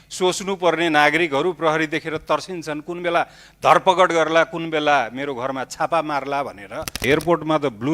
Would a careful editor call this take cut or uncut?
cut